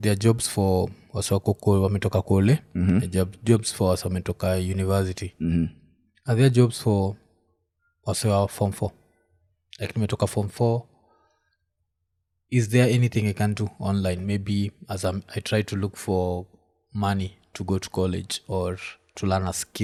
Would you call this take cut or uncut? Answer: uncut